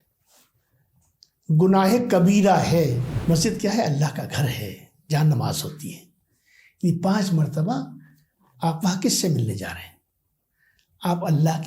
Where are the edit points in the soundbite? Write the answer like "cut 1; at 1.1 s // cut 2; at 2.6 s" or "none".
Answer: cut 1; at 3.1 s